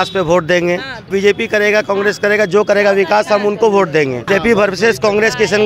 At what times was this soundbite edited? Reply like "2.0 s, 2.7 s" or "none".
1.1 s, 4.3 s